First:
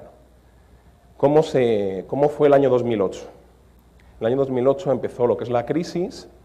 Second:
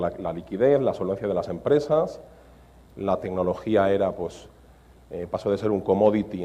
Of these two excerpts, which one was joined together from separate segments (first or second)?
second